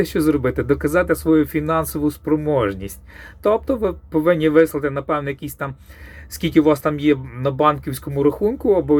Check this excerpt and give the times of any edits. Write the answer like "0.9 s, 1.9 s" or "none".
none